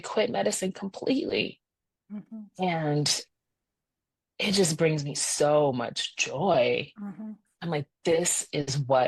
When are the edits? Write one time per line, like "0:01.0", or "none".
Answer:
none